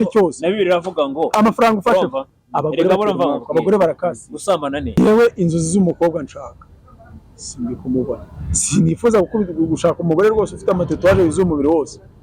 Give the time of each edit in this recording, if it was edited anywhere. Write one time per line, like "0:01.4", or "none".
0:04.9